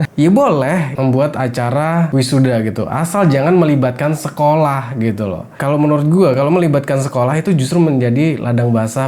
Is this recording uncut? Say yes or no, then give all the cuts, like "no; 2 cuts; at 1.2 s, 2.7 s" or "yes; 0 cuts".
no; 2 cuts; at 0.9 s, 2.1 s